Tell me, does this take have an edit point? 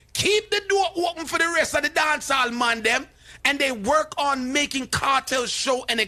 no; 0 cuts

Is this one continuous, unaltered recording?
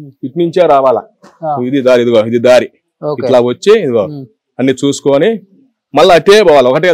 yes; 0 cuts

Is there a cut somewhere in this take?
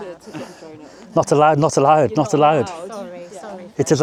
no; 0 cuts

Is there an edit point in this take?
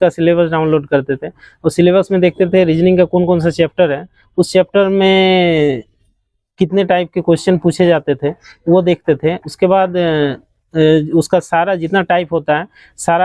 no; 0 cuts

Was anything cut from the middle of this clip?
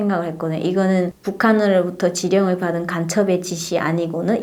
no; 0 cuts

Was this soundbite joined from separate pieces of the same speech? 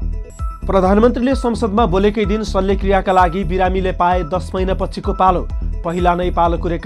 no; 0 cuts

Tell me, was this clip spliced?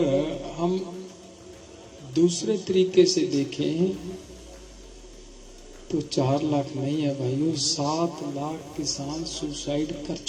no; 0 cuts

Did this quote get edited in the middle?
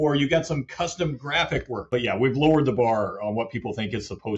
yes; 1 cut; at 1.8 s

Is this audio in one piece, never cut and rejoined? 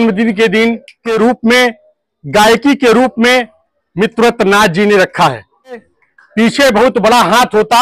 no; 2 cuts; at 1.0 s, 5.9 s

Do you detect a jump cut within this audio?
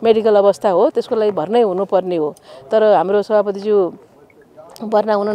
no; 0 cuts

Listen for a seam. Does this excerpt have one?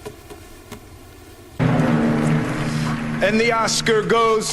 yes; 1 cut; at 1.5 s

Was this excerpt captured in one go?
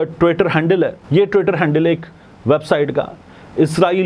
no; 1 cut; at 1.0 s

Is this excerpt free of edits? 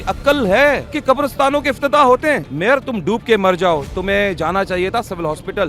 no; 2 cuts; at 0.9 s, 2.5 s

